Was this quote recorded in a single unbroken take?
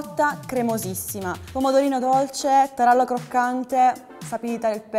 no; 1 cut; at 1.4 s

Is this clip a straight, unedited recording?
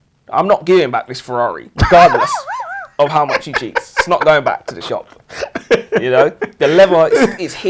yes; 0 cuts

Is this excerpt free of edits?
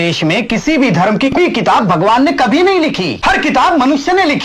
no; 2 cuts; at 1.4 s, 3.1 s

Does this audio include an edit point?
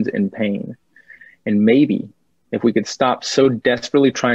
no; 0 cuts

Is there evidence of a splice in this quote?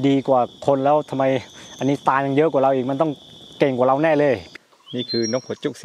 yes; 1 cut; at 4.5 s

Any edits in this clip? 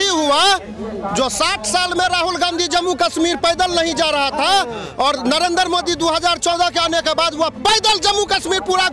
no; 0 cuts

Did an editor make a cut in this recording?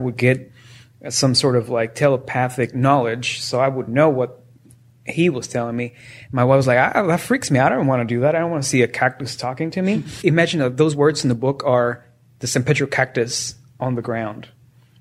yes; 1 cut; at 10.1 s

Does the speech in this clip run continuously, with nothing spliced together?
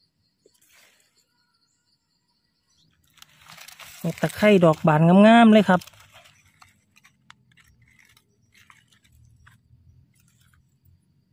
yes; 0 cuts

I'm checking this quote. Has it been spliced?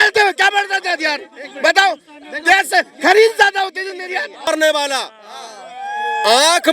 yes; 1 cut; at 4.5 s

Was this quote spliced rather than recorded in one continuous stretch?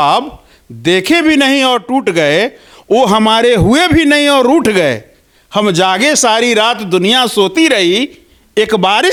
no; 0 cuts

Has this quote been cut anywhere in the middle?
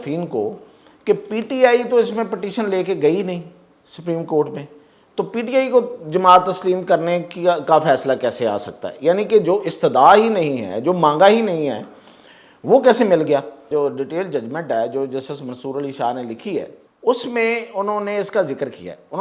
yes; 2 cuts; at 13.7 s, 16.8 s

